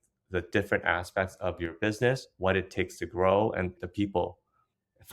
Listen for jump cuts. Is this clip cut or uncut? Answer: cut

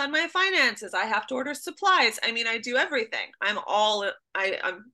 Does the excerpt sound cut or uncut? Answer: uncut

